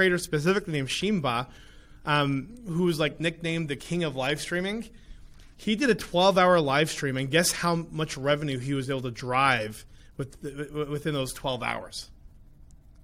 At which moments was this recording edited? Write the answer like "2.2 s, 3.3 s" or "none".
none